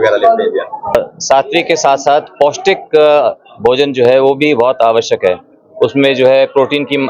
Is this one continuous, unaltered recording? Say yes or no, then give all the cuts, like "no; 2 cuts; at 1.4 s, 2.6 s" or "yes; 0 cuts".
no; 1 cut; at 0.9 s